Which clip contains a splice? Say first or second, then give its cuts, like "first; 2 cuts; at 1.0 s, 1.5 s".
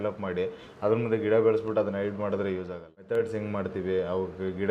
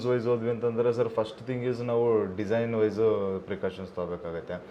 first; 1 cut; at 3.0 s